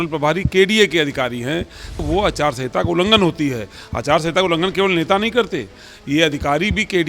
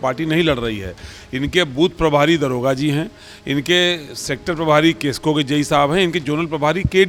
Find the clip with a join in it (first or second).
first